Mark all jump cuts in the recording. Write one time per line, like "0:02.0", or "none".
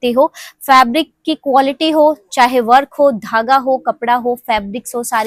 none